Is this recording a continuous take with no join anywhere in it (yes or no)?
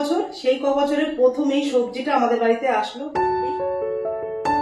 no